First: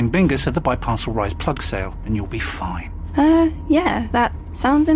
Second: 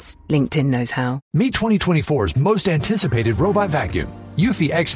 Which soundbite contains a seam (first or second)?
second